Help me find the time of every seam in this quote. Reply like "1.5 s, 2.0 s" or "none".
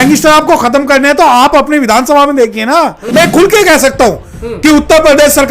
3.2 s